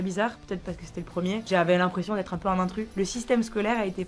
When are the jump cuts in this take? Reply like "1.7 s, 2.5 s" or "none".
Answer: 1.4 s, 2.8 s